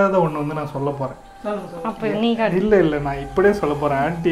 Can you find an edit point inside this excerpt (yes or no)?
no